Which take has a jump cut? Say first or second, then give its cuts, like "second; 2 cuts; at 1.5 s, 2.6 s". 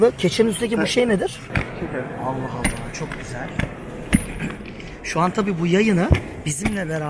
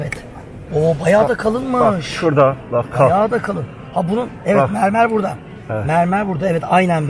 first; 1 cut; at 1.5 s